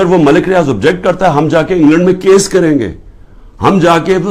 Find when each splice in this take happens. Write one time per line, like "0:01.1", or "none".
none